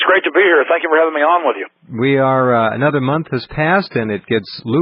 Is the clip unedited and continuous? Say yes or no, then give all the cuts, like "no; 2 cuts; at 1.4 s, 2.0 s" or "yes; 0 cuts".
no; 1 cut; at 2.5 s